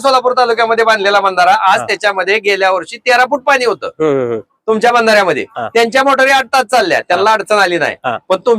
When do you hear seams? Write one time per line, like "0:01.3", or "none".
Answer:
none